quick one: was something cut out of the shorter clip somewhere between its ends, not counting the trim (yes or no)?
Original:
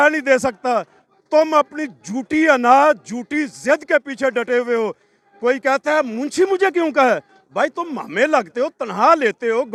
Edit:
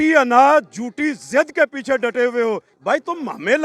yes